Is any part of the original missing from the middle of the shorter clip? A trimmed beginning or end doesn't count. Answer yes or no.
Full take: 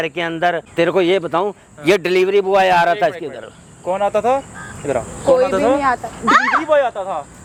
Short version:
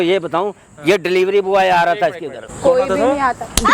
yes